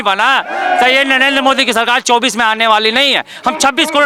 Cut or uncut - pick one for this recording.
uncut